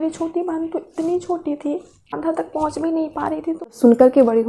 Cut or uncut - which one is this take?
cut